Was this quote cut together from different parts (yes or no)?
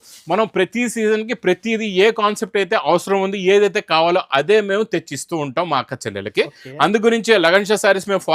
no